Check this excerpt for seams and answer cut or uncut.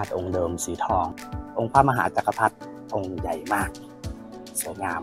cut